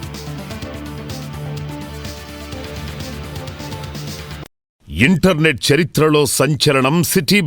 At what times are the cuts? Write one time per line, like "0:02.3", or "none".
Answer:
0:04.8

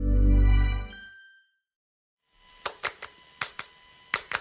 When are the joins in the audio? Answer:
0:02.0

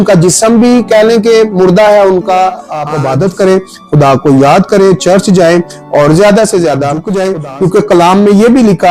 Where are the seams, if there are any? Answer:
0:02.8
0:07.1

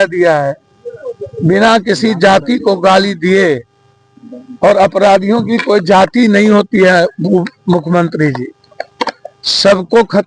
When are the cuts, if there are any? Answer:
none

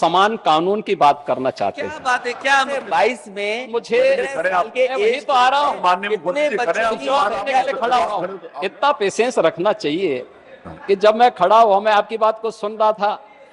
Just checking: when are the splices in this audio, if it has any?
0:02.8
0:08.4

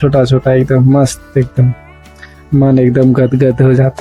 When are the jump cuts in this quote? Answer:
none

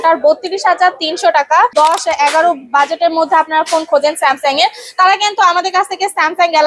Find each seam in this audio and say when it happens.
0:01.7

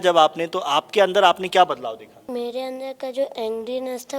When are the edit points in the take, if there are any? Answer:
0:02.3

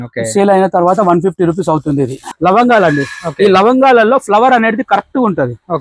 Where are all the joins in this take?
0:02.3

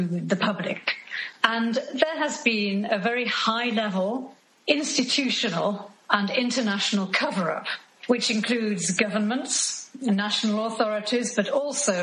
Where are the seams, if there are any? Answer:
0:01.2

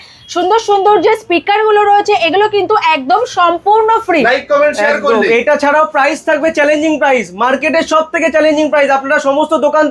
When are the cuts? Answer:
none

